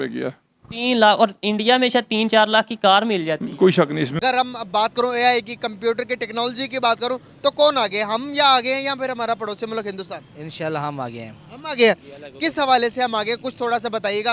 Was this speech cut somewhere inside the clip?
yes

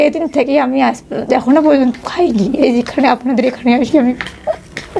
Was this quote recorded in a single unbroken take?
yes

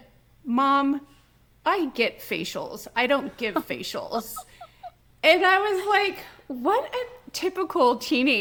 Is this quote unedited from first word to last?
yes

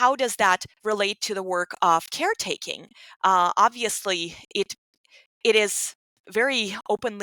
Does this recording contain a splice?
no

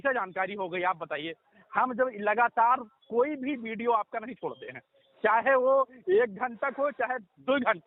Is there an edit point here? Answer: no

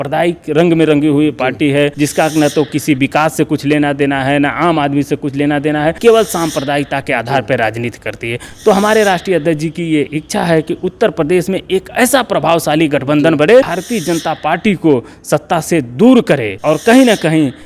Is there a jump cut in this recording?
yes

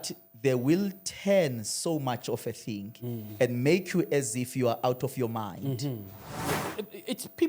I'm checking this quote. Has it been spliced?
yes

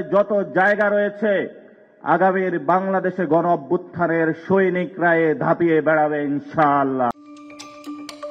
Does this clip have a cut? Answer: no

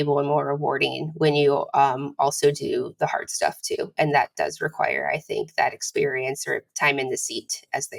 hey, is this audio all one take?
yes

